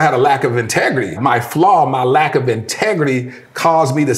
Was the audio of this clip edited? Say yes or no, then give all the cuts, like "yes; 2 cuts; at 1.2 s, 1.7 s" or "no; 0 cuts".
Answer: yes; 1 cut; at 1.2 s